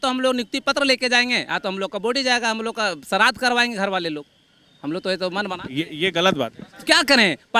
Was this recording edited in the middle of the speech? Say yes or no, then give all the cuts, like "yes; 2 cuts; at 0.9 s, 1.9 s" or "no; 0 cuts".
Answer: no; 0 cuts